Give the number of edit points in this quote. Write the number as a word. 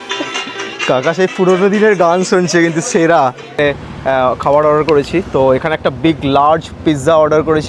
one